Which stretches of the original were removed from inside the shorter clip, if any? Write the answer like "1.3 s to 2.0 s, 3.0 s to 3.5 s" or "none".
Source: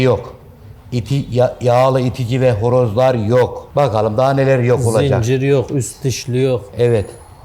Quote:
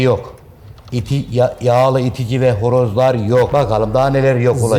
3.5 s to 3.7 s